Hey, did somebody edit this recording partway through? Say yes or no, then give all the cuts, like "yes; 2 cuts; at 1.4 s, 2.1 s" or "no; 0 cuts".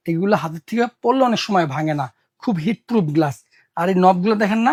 no; 0 cuts